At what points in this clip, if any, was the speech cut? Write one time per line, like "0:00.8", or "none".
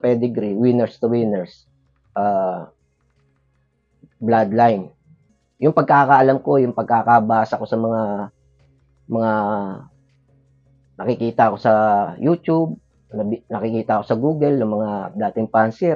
0:05.2